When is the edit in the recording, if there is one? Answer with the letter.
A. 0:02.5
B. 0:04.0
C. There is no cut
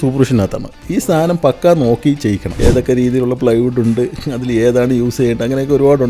A